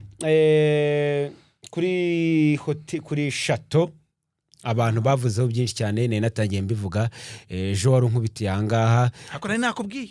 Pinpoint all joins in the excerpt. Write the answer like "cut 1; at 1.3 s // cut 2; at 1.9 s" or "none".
none